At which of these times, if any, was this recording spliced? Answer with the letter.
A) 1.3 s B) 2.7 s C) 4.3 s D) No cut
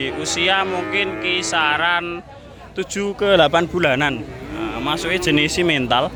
D